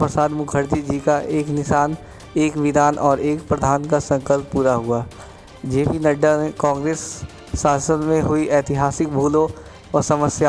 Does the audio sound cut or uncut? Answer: uncut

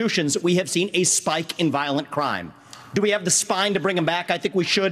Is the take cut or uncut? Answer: uncut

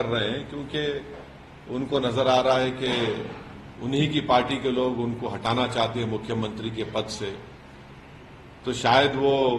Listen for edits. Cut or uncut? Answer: uncut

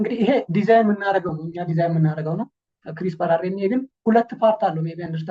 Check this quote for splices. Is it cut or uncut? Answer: uncut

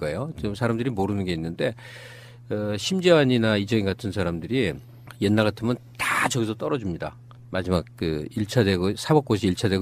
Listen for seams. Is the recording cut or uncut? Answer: uncut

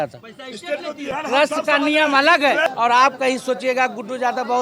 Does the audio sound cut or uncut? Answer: cut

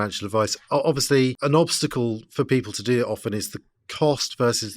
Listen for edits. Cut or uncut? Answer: cut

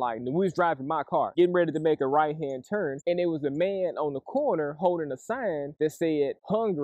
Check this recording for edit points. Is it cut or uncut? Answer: cut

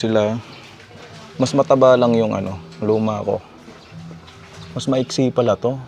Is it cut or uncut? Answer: uncut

